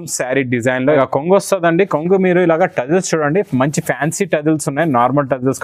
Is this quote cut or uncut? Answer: cut